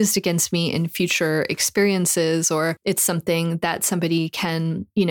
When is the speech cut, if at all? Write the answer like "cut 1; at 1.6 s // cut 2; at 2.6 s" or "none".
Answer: cut 1; at 2.8 s